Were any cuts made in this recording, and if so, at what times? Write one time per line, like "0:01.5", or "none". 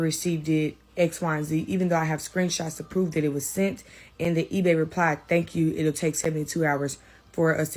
none

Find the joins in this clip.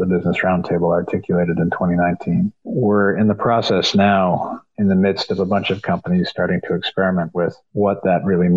0:02.6
0:04.6
0:07.6

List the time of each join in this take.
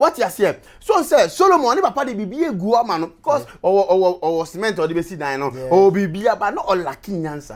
none

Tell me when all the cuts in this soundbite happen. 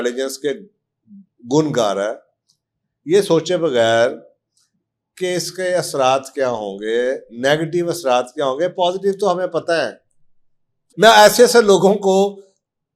0:10.9

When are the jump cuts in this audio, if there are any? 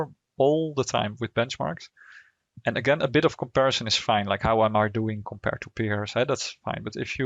none

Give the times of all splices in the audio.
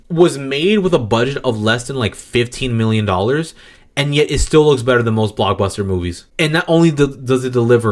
none

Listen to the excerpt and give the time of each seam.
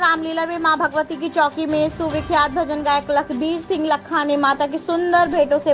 none

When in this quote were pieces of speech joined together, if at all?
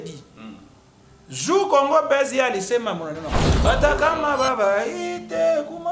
0:03.6

